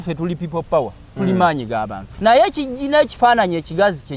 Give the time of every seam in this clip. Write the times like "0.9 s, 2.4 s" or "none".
2.0 s